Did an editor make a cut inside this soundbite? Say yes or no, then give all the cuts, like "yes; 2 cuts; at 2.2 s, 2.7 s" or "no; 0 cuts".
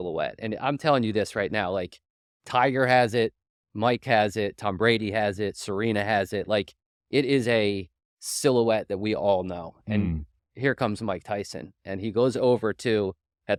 no; 0 cuts